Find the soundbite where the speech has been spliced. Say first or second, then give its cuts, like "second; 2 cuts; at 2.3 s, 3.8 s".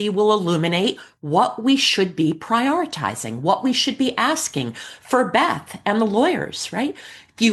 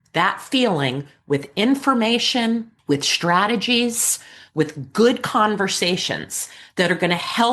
second; 1 cut; at 2.7 s